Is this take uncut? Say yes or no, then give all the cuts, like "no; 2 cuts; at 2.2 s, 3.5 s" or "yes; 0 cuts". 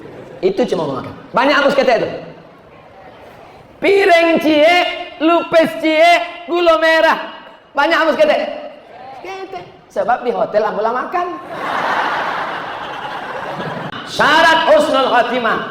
no; 1 cut; at 14.0 s